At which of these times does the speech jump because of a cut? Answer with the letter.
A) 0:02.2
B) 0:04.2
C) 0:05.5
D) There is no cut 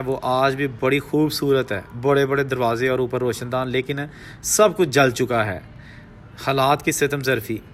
D